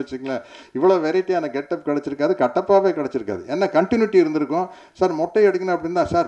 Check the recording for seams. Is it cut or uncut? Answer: uncut